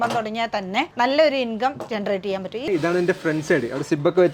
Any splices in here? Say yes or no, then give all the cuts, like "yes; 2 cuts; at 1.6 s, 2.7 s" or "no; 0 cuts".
yes; 2 cuts; at 0.9 s, 2.6 s